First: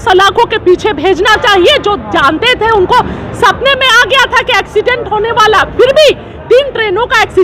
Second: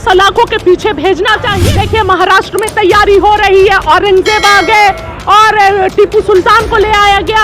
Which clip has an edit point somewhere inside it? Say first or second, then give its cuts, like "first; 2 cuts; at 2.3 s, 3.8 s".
second; 1 cut; at 1.5 s